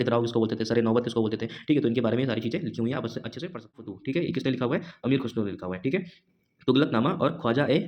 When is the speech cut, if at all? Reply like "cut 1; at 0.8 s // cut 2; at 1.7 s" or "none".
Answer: cut 1; at 3.9 s